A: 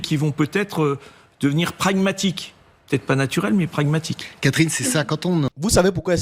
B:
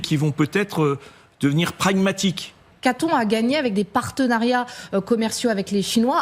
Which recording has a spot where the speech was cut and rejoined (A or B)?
B